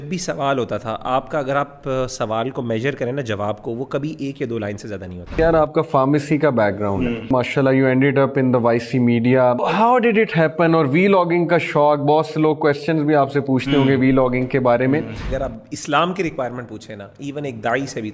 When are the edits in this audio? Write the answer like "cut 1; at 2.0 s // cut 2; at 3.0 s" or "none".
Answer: cut 1; at 5.3 s // cut 2; at 7.3 s // cut 3; at 9.6 s // cut 4; at 15.2 s